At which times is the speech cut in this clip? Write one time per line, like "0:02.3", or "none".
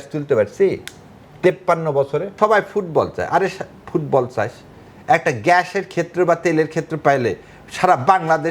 0:02.3